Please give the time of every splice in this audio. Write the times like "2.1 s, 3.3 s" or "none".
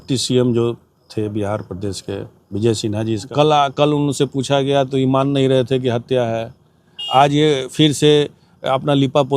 3.3 s